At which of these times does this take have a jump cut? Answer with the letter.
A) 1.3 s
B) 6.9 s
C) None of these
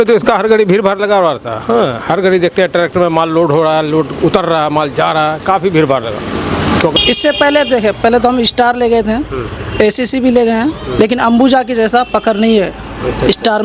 B